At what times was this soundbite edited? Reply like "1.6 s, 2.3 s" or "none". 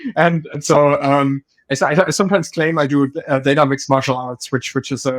none